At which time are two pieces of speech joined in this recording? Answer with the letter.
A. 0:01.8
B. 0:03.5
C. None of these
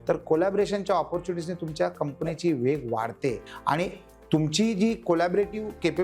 B